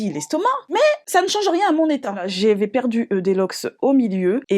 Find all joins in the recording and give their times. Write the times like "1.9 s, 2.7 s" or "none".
2.3 s

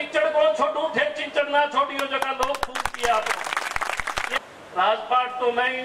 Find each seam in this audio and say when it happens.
4.4 s

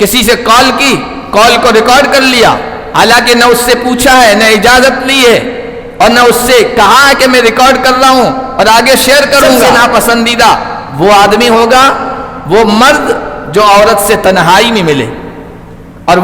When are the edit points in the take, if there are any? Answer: 9.7 s

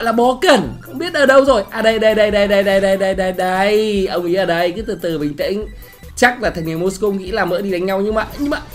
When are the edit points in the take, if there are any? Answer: none

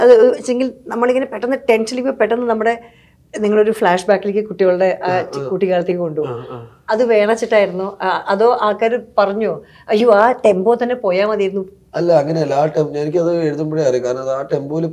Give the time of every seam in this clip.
none

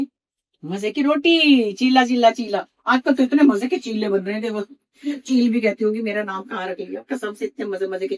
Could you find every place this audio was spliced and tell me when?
none

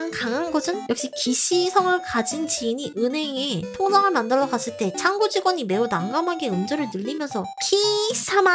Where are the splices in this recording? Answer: none

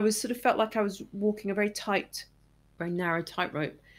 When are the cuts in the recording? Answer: none

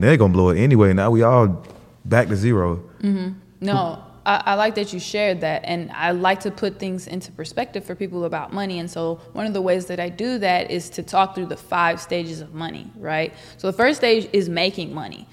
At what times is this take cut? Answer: none

